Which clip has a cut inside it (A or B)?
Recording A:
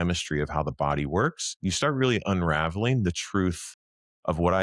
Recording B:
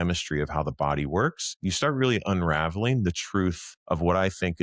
B